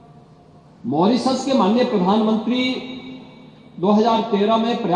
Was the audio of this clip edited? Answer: no; 0 cuts

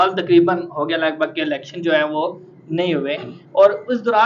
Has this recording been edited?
no; 0 cuts

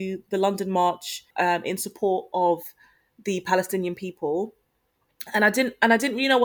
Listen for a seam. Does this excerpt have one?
yes; 1 cut; at 1.3 s

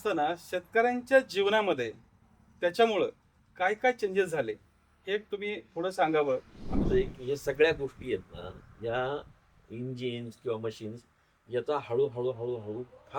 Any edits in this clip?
yes; 1 cut; at 6.8 s

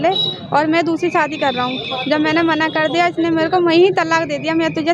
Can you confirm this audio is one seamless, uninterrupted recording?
yes; 0 cuts

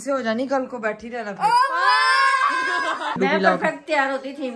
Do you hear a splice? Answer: yes; 1 cut; at 3.2 s

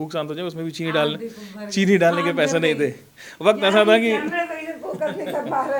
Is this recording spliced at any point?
no; 0 cuts

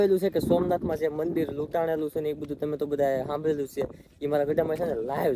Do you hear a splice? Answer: no; 0 cuts

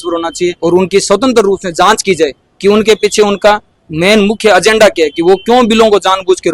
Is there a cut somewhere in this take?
no; 0 cuts

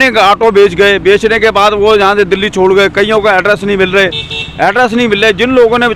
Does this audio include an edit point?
no; 0 cuts

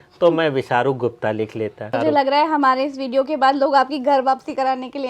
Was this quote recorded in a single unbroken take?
no; 1 cut; at 1.9 s

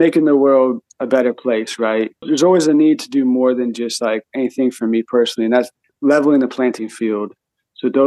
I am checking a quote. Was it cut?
yes; 3 cuts; at 0.9 s, 2.2 s, 5.8 s

